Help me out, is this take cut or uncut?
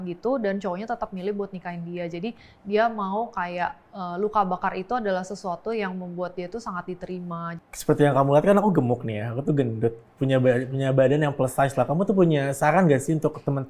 cut